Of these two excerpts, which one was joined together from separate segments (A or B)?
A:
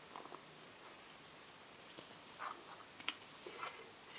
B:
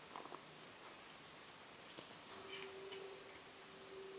B